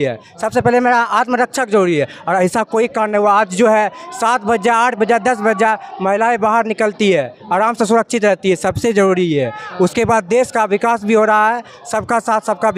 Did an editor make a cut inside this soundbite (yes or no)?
no